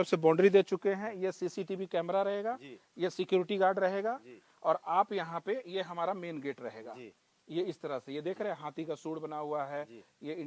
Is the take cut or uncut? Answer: uncut